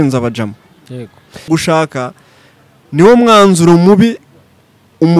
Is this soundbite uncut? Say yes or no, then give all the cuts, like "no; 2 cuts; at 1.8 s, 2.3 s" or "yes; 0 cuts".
no; 1 cut; at 1.5 s